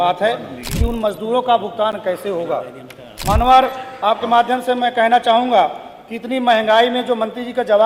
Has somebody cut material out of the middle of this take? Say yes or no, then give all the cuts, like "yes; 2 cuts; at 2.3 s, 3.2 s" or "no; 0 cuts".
no; 0 cuts